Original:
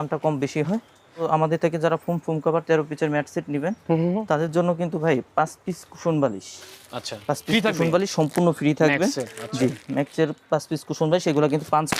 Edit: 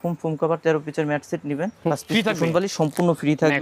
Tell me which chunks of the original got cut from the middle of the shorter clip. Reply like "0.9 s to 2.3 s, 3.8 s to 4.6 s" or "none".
3.9 s to 7.3 s